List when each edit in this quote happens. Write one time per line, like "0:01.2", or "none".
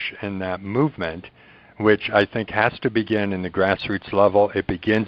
none